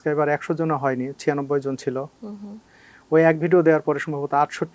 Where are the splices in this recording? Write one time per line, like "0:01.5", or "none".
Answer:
none